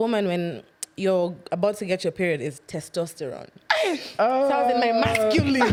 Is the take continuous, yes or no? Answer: yes